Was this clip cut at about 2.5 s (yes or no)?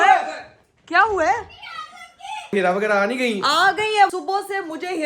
yes